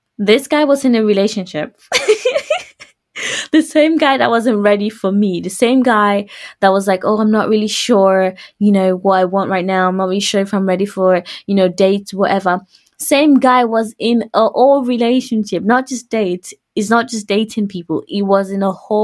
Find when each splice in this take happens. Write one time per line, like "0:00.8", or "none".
0:01.8

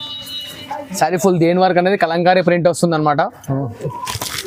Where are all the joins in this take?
none

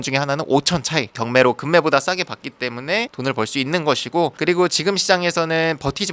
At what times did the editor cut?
0:01.1

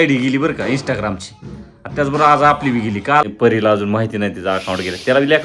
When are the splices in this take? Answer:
0:03.3

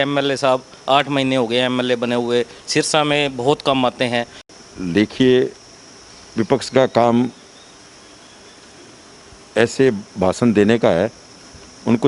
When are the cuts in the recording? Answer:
0:04.4

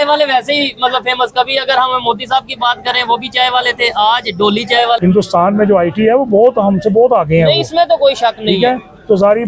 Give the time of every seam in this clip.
0:05.0

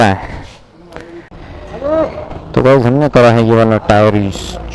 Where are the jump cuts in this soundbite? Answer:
0:01.3

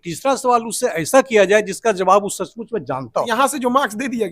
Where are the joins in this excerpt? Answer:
0:03.1

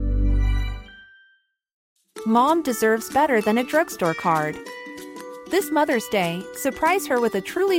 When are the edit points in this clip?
0:01.7

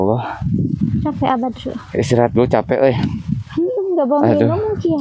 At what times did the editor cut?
none

